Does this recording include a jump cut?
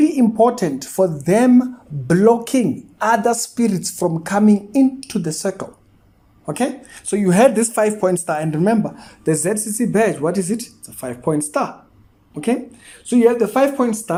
no; 0 cuts

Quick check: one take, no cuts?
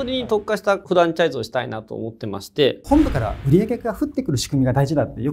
no; 1 cut; at 2.8 s

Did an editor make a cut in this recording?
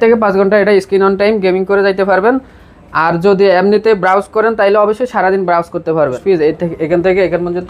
yes; 1 cut; at 6.2 s

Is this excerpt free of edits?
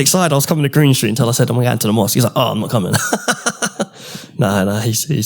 yes; 0 cuts

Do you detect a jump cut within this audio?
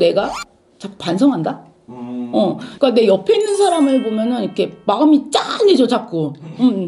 yes; 1 cut; at 2.7 s

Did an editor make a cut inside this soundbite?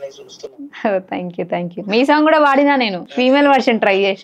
yes; 1 cut; at 3.0 s

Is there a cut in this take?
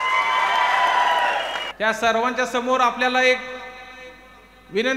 yes; 1 cut; at 1.6 s

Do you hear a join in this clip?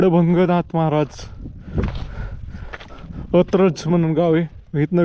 no; 0 cuts

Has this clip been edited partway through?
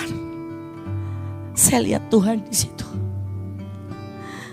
no; 0 cuts

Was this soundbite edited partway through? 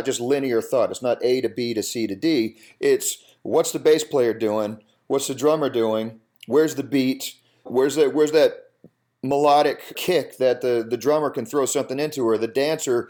yes; 2 cuts; at 7.7 s, 9.9 s

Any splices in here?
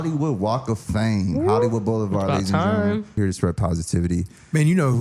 yes; 1 cut; at 3.2 s

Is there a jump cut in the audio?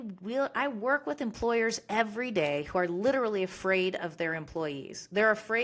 no; 0 cuts

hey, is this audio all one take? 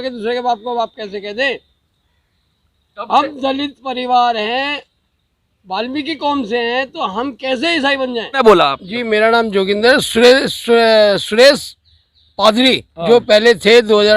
no; 1 cut; at 8.4 s

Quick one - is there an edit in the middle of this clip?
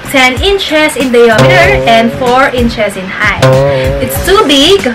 no; 0 cuts

